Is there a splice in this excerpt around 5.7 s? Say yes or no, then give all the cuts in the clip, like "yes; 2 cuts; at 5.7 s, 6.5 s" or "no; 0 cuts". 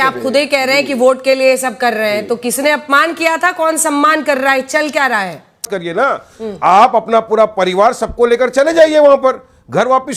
yes; 1 cut; at 5.7 s